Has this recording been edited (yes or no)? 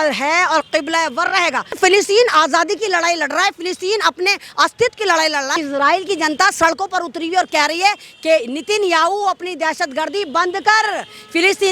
yes